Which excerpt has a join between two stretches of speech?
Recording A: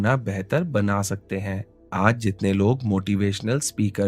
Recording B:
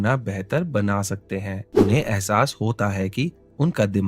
B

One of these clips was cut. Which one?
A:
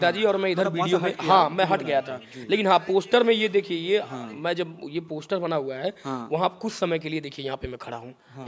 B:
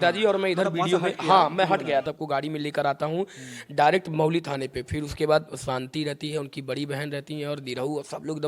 B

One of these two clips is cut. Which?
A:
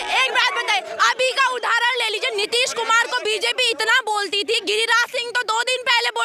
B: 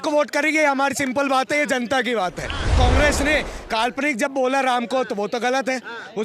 B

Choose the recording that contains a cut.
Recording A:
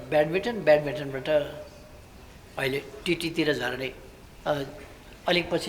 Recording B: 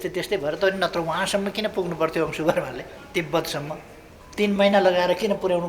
B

